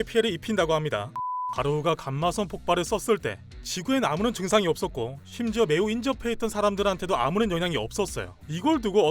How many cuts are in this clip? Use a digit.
1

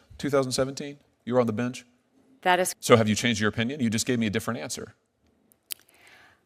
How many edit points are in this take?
1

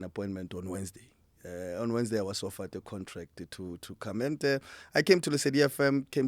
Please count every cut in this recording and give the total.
0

